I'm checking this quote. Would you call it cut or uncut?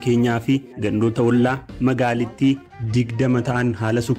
uncut